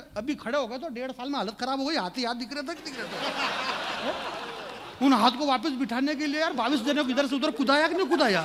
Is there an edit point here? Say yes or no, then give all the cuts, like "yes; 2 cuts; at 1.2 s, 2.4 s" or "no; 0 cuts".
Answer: no; 0 cuts